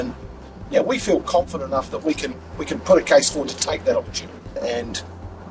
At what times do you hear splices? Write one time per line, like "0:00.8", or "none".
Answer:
0:04.6